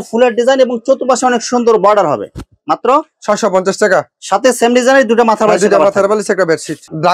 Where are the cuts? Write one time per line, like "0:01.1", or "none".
none